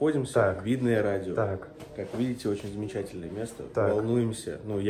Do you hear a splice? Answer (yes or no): no